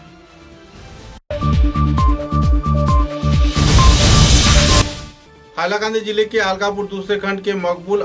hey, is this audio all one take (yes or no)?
yes